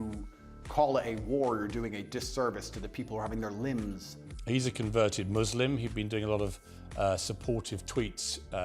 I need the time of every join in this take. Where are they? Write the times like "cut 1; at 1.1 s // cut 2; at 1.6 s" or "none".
cut 1; at 4.3 s